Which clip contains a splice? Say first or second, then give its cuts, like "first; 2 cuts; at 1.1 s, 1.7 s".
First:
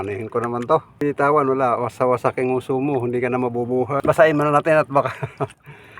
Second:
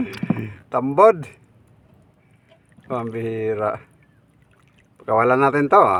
first; 2 cuts; at 1.0 s, 4.0 s